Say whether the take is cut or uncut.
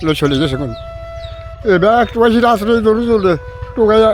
cut